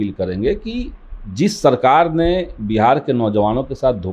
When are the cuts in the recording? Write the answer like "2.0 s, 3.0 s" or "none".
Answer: none